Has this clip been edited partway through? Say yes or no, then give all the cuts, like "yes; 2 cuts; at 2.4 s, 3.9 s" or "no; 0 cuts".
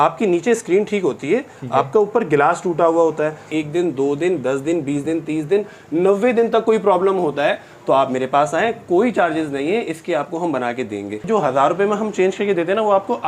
yes; 2 cuts; at 3.5 s, 11.2 s